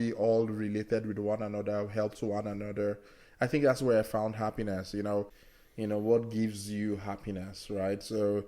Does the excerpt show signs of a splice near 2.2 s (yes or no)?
no